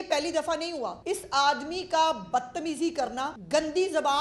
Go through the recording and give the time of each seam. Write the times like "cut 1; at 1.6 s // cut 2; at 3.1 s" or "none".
cut 1; at 1.0 s // cut 2; at 3.4 s